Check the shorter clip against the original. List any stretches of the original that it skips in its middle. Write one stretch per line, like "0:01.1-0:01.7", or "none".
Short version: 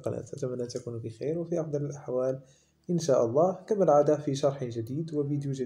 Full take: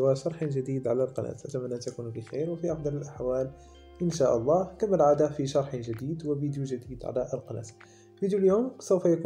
none